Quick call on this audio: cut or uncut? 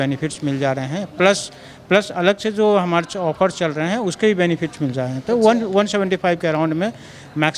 uncut